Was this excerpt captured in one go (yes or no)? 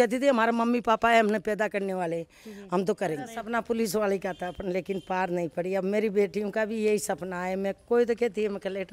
no